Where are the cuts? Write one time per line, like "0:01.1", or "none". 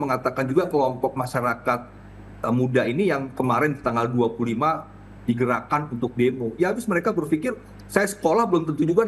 none